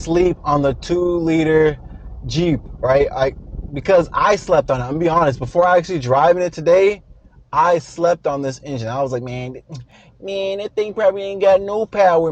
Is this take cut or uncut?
uncut